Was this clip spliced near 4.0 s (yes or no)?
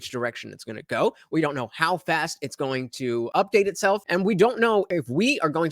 yes